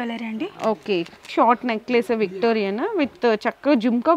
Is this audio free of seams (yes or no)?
no